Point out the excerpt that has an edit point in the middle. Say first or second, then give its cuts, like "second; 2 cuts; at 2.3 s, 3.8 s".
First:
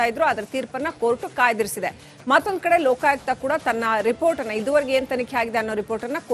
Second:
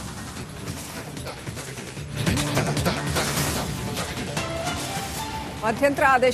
second; 1 cut; at 1.2 s